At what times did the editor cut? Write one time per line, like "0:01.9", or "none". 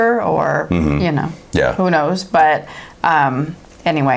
none